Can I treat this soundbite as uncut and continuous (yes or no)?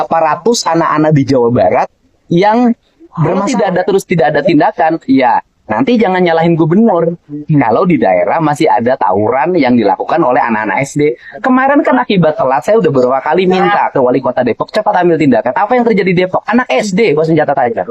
no